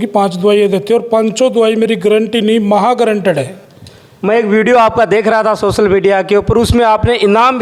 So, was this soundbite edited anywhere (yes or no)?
no